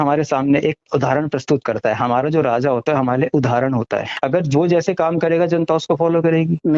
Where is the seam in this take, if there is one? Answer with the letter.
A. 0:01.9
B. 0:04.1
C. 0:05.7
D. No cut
B